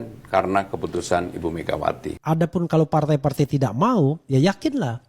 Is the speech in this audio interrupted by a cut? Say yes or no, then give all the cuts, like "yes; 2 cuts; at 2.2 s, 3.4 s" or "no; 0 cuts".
yes; 1 cut; at 2.1 s